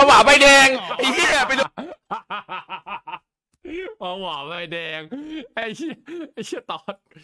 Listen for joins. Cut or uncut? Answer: uncut